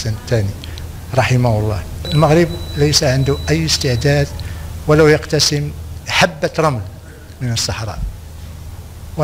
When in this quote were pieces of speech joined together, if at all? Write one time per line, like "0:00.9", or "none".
0:02.1